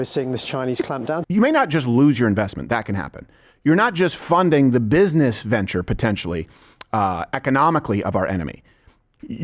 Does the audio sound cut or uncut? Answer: cut